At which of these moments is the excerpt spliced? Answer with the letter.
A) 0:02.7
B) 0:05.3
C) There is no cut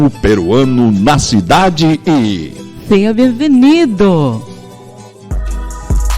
B